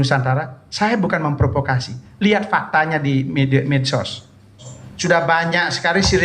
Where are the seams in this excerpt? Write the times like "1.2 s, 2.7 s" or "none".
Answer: 4.6 s